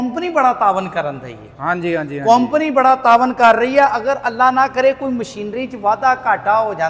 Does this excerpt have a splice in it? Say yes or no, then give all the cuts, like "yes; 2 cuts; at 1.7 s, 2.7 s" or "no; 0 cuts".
no; 0 cuts